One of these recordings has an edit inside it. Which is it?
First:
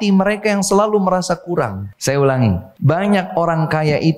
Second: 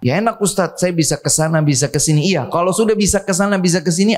first; 2 cuts; at 1.9 s, 2.7 s

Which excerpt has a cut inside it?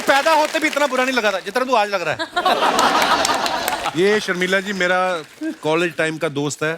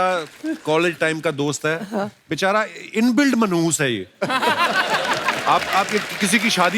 first; 1 cut; at 3.8 s

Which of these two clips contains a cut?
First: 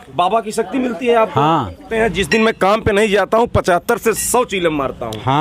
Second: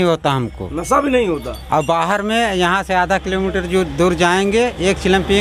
first; 1 cut; at 1.9 s

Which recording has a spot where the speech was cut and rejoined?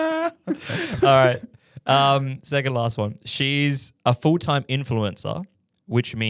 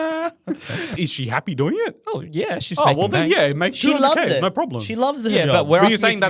second; 1 cut; at 1.0 s

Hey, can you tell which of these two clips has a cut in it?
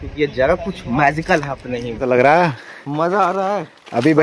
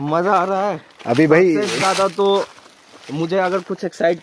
first; 1 cut; at 1.9 s

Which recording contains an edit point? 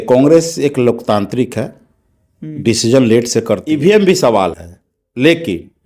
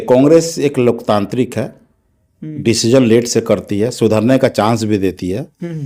first; 1 cut; at 3.7 s

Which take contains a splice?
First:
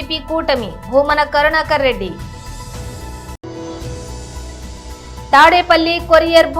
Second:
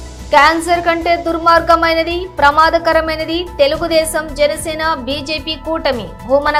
first; 3 cuts; at 2.2 s, 3.4 s, 5.3 s

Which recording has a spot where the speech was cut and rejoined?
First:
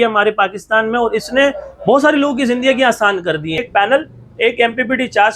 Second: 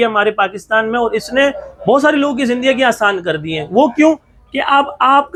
first; 1 cut; at 3.7 s

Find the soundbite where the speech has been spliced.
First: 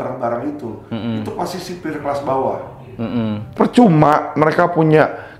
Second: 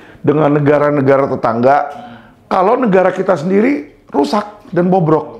first; 1 cut; at 3.5 s

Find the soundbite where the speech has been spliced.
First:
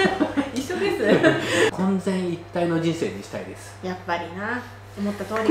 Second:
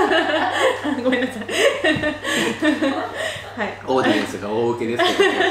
first; 1 cut; at 1.7 s

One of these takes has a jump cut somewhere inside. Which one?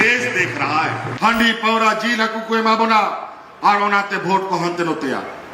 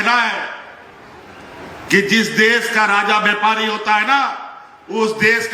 first; 1 cut; at 1.2 s

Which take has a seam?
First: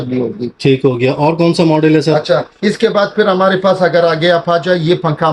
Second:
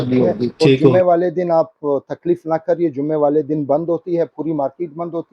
second; 1 cut; at 0.9 s

